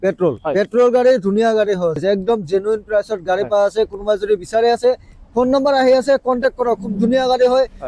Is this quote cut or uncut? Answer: cut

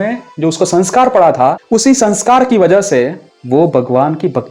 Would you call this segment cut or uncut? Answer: cut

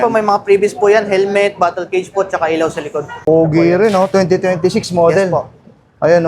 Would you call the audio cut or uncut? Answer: cut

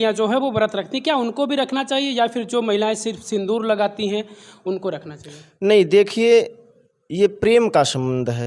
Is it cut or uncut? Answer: uncut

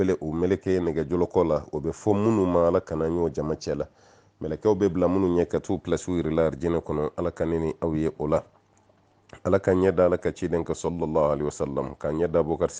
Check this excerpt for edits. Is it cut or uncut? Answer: cut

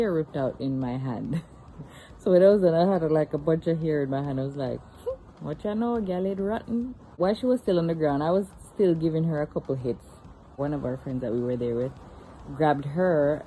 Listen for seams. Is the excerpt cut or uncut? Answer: cut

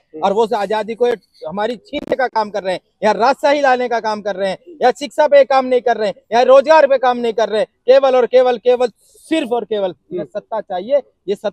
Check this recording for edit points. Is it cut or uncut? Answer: uncut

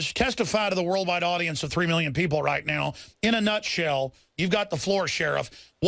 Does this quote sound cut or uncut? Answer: cut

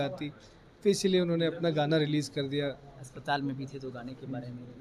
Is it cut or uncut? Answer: uncut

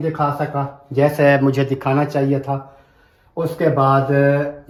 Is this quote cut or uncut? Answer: uncut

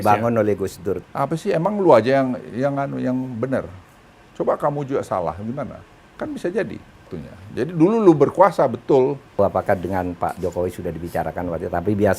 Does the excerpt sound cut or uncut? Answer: cut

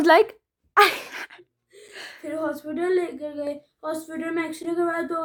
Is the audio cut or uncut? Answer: uncut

